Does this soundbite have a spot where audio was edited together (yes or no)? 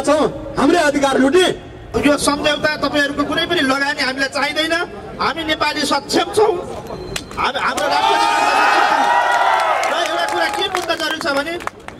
yes